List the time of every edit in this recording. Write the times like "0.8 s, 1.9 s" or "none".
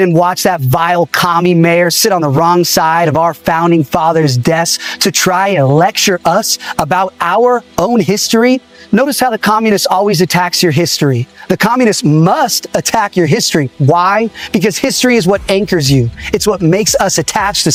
none